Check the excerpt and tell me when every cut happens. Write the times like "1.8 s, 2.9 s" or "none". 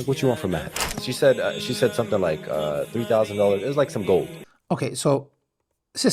none